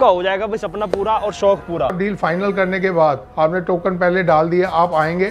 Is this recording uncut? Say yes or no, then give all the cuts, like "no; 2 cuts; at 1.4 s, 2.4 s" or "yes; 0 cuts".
no; 1 cut; at 1.9 s